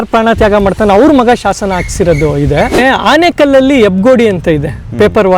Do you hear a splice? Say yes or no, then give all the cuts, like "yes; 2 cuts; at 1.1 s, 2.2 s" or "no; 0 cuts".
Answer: yes; 1 cut; at 2.7 s